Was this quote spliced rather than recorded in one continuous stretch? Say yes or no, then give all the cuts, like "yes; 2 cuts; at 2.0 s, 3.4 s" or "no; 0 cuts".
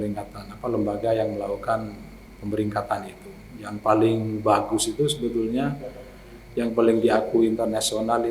no; 0 cuts